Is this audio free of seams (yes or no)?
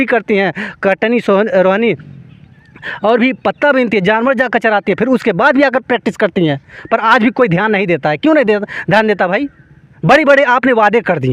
yes